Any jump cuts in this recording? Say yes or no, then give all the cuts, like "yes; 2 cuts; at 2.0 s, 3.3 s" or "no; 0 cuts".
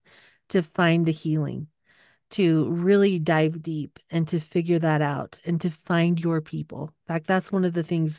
no; 0 cuts